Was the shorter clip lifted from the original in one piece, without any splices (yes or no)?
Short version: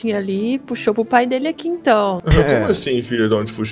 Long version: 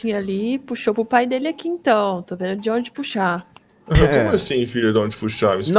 no